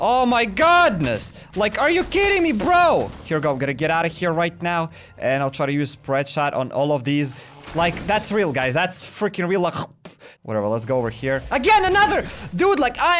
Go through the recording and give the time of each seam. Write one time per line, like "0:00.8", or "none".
0:03.2
0:10.3